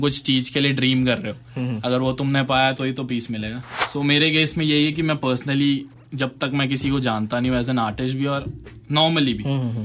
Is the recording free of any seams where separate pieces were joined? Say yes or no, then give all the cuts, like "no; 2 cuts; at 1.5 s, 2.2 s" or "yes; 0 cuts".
no; 1 cut; at 3.7 s